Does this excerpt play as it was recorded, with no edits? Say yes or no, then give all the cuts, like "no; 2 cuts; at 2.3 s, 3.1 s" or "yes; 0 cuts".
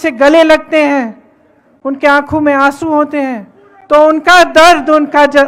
yes; 0 cuts